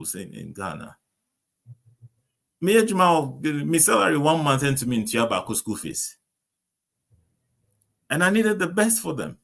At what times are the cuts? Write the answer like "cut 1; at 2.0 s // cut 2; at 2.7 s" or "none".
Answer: none